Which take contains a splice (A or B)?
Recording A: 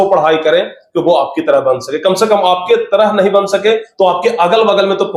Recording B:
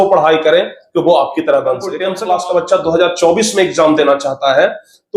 B